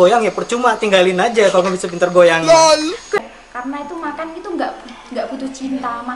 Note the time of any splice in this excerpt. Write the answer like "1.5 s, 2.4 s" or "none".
3.2 s